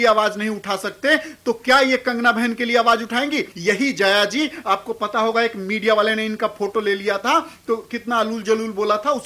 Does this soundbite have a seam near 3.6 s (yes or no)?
yes